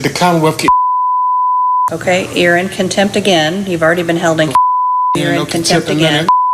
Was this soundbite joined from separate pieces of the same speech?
no; 0 cuts

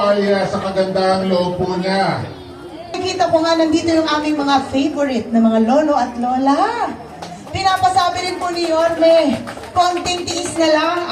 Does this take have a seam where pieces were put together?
yes; 1 cut; at 3.0 s

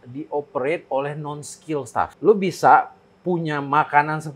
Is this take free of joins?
no; 1 cut; at 2.1 s

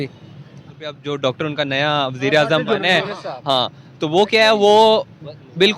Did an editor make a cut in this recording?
yes; 1 cut; at 1.0 s

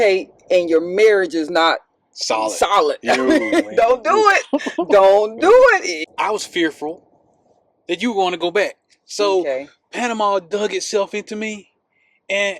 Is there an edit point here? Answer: yes; 1 cut; at 6.0 s

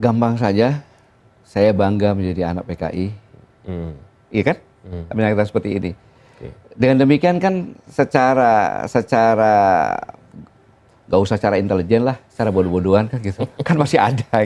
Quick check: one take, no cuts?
yes; 0 cuts

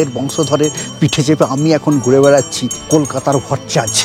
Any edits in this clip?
yes; 1 cut; at 2.8 s

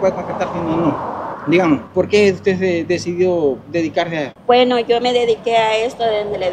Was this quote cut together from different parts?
yes; 3 cuts; at 1.3 s, 1.9 s, 4.3 s

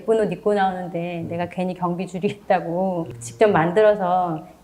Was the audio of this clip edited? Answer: no; 0 cuts

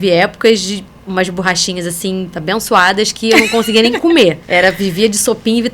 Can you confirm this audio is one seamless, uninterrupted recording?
no; 2 cuts; at 0.9 s, 4.4 s

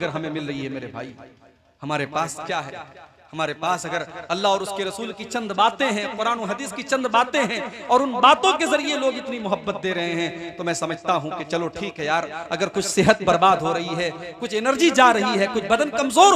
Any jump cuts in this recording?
no; 0 cuts

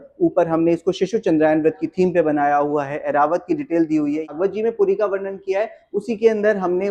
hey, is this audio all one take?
no; 1 cut; at 4.3 s

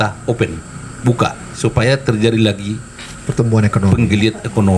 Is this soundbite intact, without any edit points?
no; 1 cut; at 1.5 s

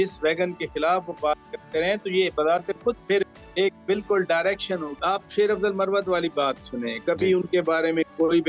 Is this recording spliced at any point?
yes; 1 cut; at 5.0 s

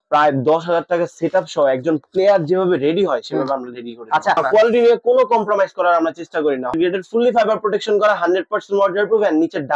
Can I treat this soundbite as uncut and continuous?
no; 2 cuts; at 4.4 s, 6.7 s

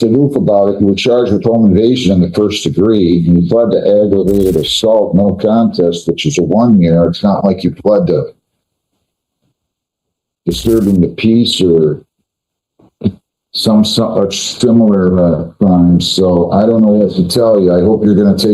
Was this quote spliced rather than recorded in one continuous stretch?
no; 0 cuts

